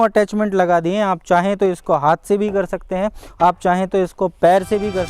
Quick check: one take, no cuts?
yes; 0 cuts

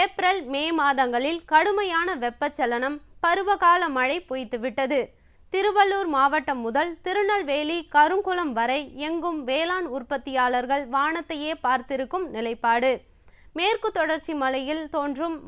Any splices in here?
no; 0 cuts

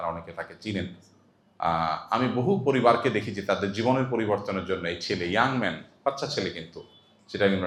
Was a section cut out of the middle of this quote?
no; 0 cuts

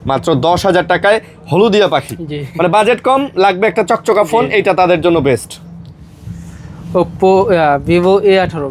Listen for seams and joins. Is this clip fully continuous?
yes; 0 cuts

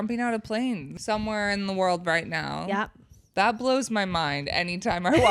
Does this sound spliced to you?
yes; 1 cut; at 0.9 s

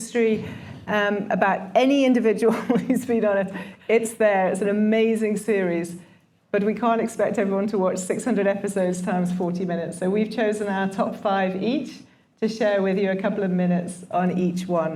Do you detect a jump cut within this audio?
no; 0 cuts

